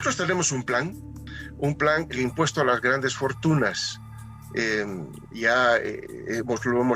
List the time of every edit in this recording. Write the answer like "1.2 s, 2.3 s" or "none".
2.1 s